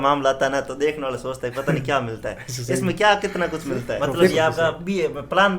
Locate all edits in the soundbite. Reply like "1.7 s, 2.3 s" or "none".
4.3 s